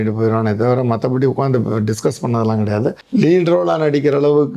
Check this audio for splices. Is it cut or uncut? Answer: cut